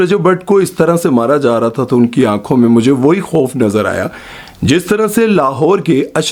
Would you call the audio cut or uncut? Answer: uncut